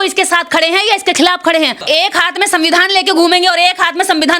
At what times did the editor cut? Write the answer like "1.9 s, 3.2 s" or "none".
1.8 s